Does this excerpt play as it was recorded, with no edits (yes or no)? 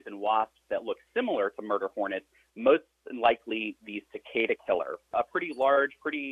no